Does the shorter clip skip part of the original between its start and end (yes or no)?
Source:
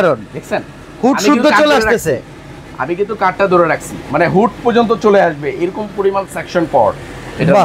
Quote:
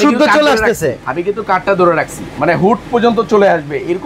yes